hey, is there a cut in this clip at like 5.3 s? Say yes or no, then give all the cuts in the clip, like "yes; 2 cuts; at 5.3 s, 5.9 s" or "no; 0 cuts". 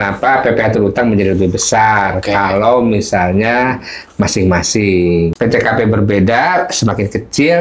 yes; 1 cut; at 5.3 s